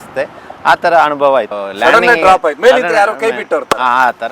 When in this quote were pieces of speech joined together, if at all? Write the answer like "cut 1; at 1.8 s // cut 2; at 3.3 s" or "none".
none